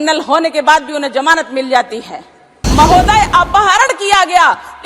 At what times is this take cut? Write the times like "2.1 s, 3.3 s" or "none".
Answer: 2.6 s